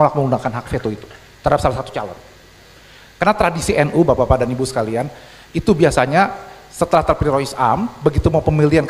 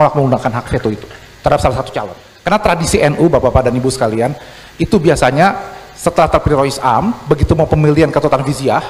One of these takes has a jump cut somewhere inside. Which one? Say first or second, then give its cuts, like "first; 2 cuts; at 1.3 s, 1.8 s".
second; 1 cut; at 2.2 s